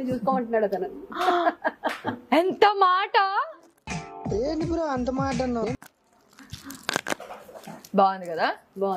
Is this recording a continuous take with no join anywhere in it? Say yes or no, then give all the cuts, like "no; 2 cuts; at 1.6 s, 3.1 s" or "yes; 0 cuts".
yes; 0 cuts